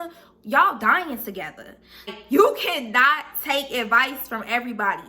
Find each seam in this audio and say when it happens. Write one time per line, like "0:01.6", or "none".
0:02.1